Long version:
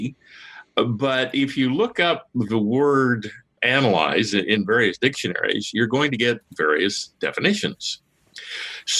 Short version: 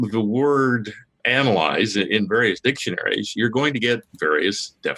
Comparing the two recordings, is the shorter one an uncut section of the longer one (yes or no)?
yes